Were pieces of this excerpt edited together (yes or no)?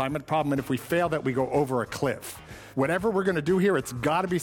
yes